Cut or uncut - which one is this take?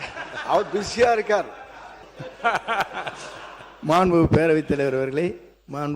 cut